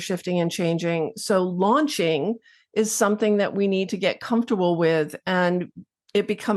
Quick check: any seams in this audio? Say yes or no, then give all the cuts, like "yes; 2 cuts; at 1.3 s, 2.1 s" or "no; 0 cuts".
no; 0 cuts